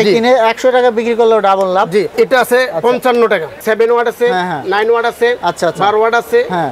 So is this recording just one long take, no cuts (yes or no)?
no